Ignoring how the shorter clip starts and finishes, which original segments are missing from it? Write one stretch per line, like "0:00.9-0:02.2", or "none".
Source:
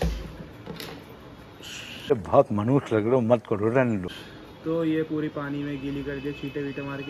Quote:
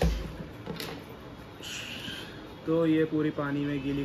0:02.0-0:04.0

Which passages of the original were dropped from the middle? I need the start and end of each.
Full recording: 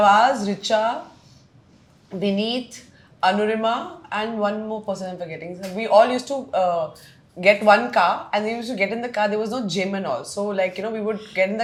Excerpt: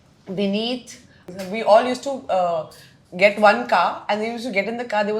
0:03.0-0:05.4

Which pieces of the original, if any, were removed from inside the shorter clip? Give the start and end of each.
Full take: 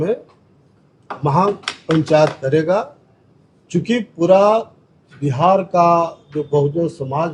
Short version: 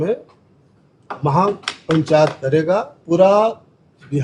0:03.0-0:04.1

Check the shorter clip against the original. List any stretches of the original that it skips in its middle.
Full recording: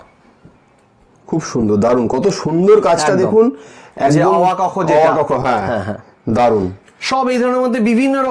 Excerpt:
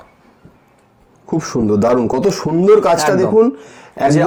none

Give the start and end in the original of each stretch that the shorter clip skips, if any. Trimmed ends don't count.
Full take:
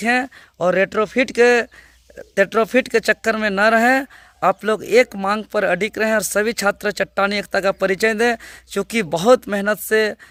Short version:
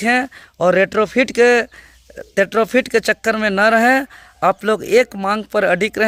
none

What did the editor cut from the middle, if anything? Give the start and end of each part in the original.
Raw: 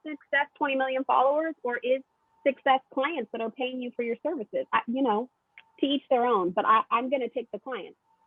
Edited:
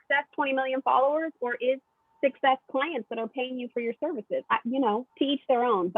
0:05.3-0:05.7

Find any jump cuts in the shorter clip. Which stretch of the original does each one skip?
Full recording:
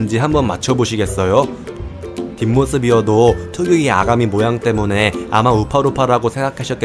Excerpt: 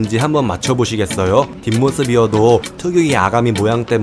0:01.6-0:02.3

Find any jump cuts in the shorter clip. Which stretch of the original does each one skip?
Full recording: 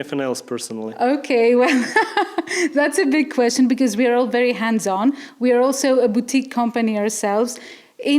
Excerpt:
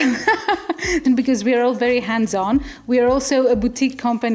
0:02.7-0:03.5

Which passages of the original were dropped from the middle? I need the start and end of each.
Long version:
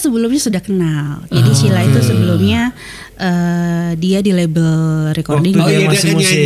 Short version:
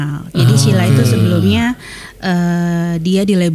none

